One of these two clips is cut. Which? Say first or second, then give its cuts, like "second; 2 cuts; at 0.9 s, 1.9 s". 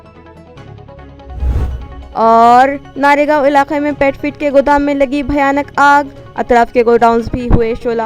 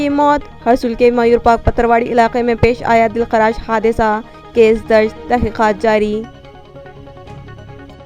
first; 1 cut; at 1.7 s